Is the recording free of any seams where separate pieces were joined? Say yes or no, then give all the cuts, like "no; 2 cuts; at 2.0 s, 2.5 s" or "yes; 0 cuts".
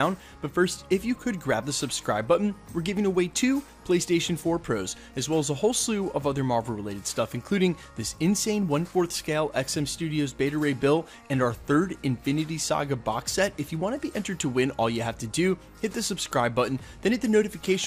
yes; 0 cuts